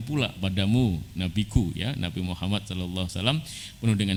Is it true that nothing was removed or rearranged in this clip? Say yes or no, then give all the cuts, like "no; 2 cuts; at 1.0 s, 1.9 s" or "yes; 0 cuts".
yes; 0 cuts